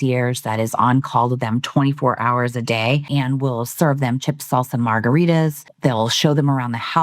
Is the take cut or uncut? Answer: cut